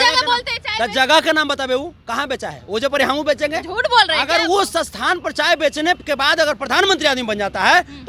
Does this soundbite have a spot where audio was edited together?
no; 0 cuts

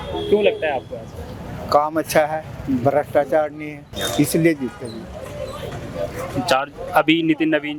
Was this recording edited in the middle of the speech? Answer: no; 0 cuts

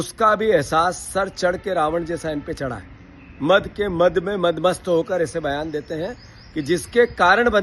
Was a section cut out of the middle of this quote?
no; 0 cuts

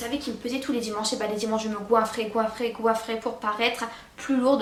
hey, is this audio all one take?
yes; 0 cuts

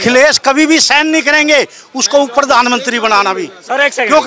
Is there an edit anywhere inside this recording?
no; 0 cuts

